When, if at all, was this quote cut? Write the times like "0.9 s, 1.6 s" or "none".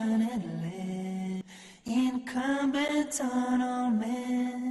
1.4 s